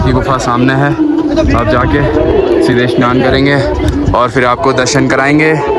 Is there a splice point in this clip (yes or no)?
no